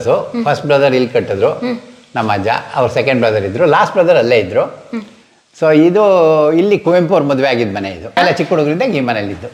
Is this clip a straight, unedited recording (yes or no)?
yes